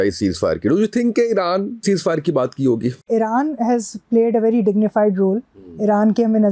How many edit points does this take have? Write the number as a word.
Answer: two